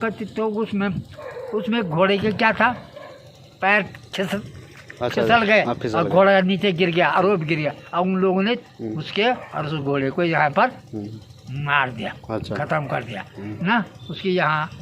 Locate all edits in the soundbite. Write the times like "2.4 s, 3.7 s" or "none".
none